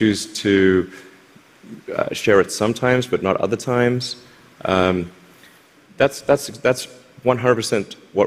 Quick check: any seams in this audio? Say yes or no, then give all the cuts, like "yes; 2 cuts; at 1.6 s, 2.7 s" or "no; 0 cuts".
no; 0 cuts